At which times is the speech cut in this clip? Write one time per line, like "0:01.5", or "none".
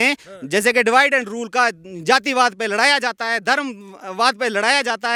none

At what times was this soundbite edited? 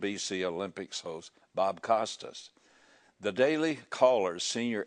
none

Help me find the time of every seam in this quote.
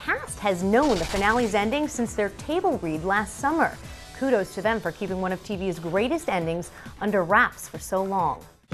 none

